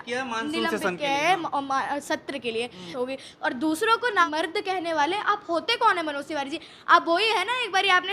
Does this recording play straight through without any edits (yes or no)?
no